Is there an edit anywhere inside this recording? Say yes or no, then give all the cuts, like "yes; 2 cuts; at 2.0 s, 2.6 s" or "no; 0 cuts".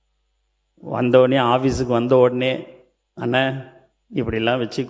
no; 0 cuts